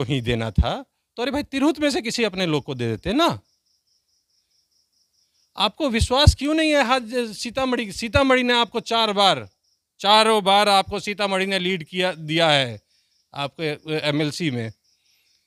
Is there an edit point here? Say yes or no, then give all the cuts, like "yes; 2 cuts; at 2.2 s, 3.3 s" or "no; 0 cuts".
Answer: no; 0 cuts